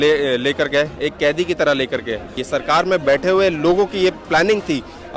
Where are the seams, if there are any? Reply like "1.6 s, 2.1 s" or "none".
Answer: 2.4 s